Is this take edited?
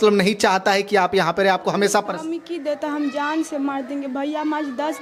no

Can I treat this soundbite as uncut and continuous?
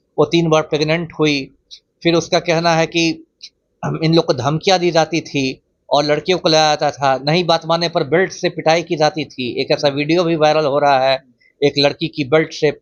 yes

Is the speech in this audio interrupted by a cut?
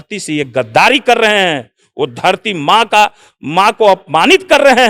no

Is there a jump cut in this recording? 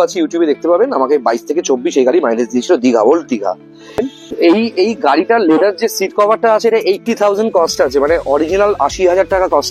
yes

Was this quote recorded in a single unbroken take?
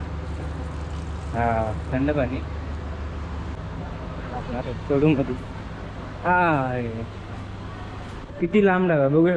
no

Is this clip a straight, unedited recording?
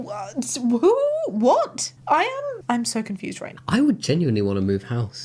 yes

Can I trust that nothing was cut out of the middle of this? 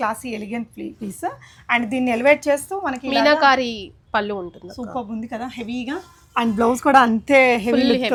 yes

